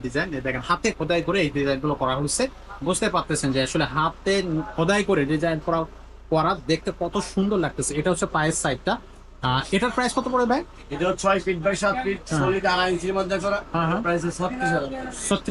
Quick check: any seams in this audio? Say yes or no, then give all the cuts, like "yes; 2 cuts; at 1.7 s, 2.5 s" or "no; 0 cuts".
no; 0 cuts